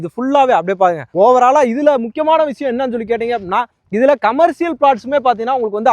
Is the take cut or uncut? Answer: uncut